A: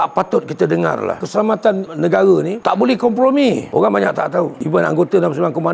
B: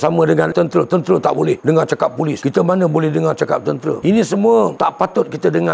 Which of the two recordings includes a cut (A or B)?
A